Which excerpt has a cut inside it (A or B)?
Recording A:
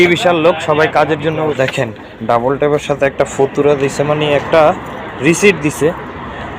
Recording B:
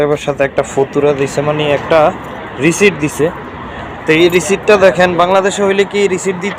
A